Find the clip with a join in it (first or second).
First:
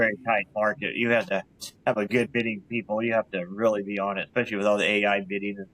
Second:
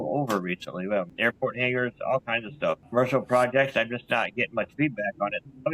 second